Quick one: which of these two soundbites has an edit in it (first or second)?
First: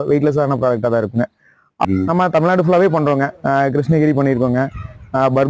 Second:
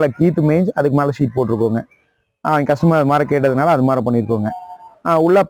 first